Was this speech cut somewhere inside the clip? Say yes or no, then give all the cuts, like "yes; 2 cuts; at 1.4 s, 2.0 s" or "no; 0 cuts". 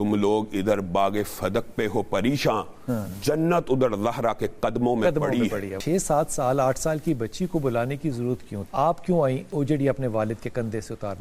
yes; 3 cuts; at 5.7 s, 8.6 s, 9.4 s